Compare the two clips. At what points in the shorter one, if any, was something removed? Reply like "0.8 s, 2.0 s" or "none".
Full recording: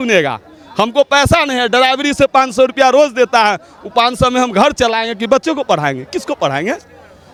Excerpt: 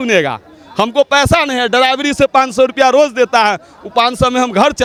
none